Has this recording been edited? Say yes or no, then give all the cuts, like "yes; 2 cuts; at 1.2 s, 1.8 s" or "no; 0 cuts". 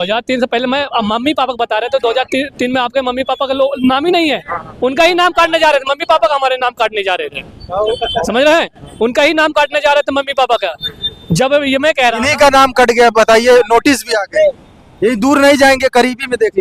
no; 0 cuts